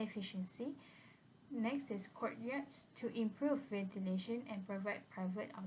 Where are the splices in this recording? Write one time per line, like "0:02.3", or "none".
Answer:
none